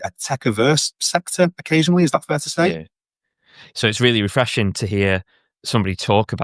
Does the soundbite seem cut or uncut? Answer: cut